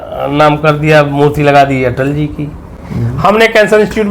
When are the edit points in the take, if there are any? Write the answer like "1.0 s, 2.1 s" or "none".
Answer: none

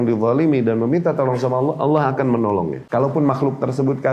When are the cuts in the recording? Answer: 2.8 s

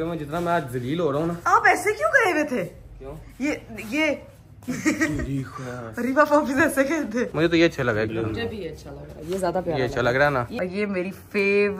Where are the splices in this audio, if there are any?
1.4 s, 7.3 s, 10.5 s

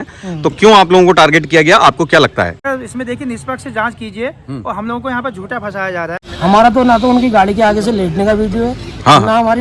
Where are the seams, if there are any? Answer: 2.6 s, 6.2 s

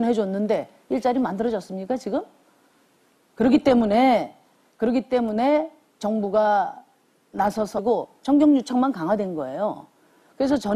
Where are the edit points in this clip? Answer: none

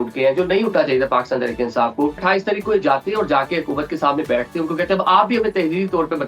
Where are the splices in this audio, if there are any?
2.2 s

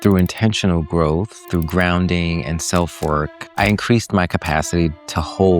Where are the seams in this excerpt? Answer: 1.4 s, 3.4 s

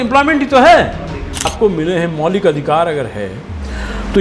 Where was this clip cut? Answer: 1.5 s

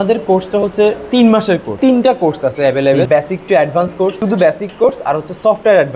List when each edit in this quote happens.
1.7 s, 3.1 s, 4.2 s

